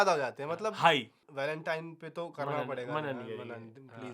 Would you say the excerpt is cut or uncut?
cut